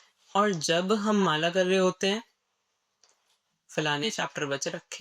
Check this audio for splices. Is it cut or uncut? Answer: uncut